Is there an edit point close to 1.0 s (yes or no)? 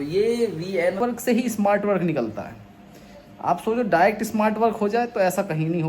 yes